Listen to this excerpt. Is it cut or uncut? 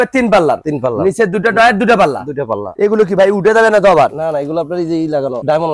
cut